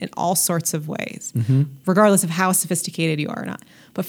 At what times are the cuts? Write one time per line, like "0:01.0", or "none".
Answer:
none